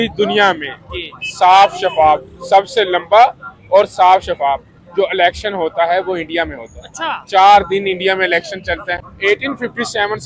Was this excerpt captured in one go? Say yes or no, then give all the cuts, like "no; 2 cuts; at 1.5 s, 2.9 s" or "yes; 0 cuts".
no; 1 cut; at 9.0 s